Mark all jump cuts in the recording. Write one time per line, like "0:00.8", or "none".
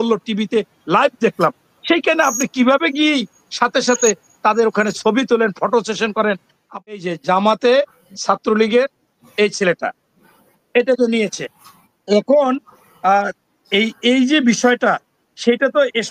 0:06.9